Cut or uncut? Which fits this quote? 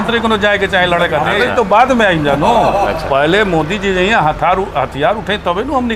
cut